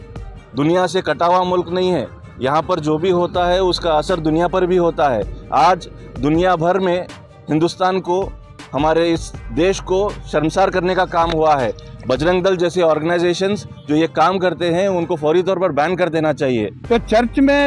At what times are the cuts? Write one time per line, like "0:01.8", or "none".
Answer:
0:11.9
0:16.7